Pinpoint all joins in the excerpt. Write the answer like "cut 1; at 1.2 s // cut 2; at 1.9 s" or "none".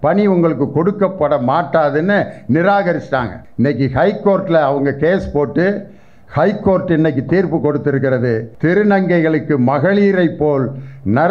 cut 1; at 3.4 s // cut 2; at 8.5 s